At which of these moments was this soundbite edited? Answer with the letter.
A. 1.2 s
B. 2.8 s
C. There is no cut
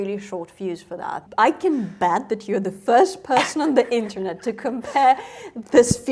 A